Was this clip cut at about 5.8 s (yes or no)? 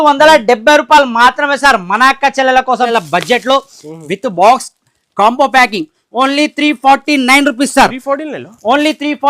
no